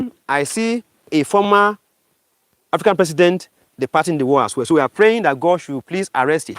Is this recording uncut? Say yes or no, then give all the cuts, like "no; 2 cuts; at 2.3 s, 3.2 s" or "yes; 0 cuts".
no; 1 cut; at 1.1 s